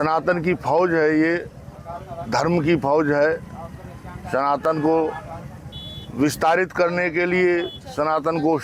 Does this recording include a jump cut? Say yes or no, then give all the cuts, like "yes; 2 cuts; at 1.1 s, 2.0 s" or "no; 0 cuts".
no; 0 cuts